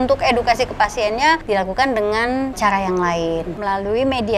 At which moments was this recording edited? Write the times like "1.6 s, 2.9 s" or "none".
1.4 s, 2.6 s, 3.5 s